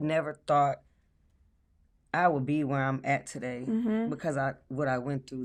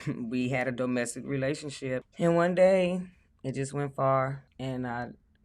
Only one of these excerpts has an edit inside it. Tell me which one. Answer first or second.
second